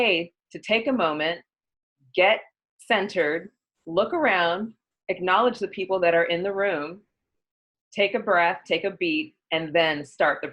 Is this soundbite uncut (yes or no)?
yes